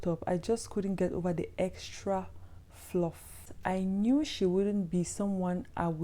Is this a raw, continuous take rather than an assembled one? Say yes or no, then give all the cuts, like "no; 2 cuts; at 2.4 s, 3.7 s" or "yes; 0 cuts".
no; 1 cut; at 3.5 s